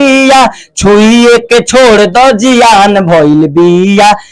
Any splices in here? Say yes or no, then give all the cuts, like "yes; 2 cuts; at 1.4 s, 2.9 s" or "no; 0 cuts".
no; 0 cuts